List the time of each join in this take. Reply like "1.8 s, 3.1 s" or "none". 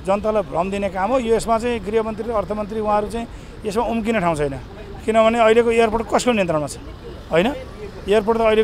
none

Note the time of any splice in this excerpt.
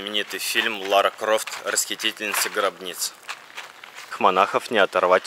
4.0 s

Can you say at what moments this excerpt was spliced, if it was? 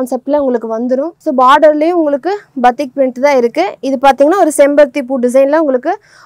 none

